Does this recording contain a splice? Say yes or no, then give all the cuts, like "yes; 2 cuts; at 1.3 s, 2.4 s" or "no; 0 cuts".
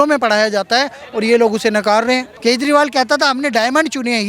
yes; 1 cut; at 2.3 s